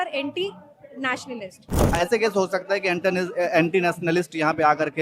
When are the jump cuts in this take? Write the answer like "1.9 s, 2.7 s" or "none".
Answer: 2.0 s